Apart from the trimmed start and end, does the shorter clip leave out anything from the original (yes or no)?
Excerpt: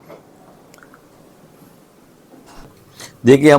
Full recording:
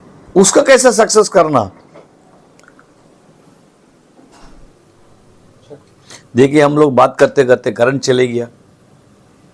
yes